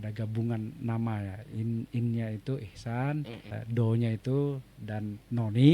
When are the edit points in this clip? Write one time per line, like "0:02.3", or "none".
0:03.5